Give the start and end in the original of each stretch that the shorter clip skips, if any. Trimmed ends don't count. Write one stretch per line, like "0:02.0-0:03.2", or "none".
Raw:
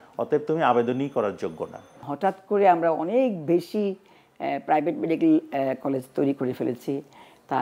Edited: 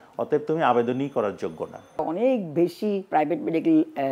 0:02.0-0:02.9
0:04.0-0:04.6